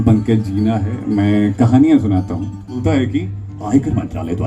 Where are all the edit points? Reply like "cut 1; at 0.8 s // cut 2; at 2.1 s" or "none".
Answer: cut 1; at 2.8 s